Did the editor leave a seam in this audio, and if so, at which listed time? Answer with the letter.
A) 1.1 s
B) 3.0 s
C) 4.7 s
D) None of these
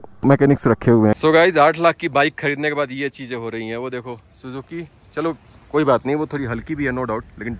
A